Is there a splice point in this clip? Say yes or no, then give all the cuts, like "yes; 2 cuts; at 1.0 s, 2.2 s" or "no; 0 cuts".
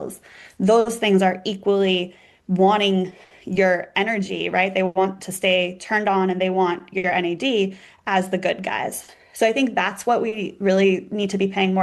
no; 0 cuts